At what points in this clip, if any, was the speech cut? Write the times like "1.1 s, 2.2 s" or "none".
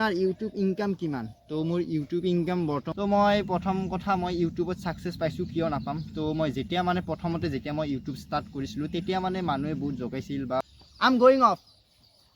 2.9 s, 10.6 s